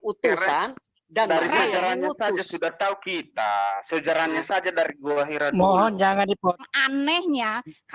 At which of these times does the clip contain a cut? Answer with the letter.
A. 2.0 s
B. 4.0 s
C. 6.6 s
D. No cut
C